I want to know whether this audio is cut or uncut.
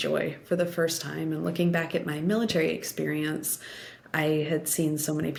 uncut